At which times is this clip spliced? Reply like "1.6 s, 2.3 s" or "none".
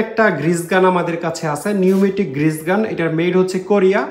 none